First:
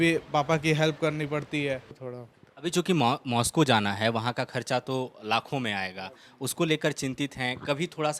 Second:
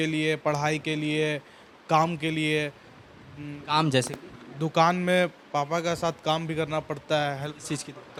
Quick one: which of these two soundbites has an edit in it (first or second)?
first